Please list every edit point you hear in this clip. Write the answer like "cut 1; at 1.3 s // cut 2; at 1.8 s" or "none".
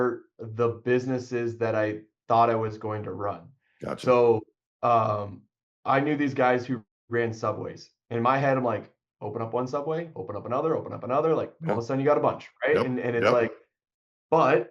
none